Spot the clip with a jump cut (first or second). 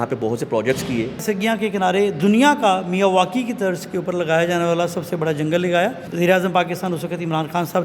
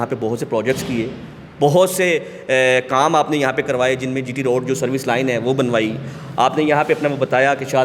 first